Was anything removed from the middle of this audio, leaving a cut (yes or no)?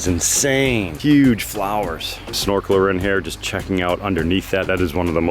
yes